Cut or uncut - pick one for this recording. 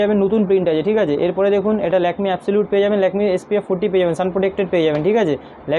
uncut